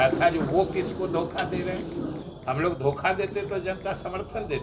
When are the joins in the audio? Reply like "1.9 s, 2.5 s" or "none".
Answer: 2.2 s

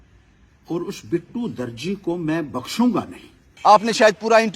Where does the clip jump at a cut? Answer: 3.5 s

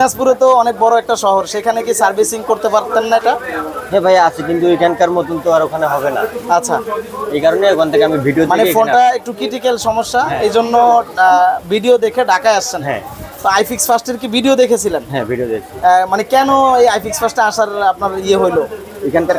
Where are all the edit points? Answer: none

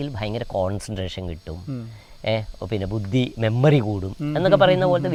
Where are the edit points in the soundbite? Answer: none

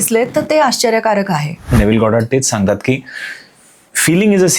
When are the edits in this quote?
1.8 s

